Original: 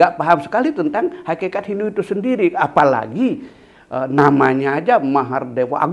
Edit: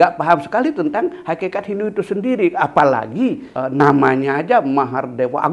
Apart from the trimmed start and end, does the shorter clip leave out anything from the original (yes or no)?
yes